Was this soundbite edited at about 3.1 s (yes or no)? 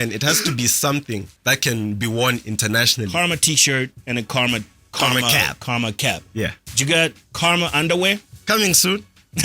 yes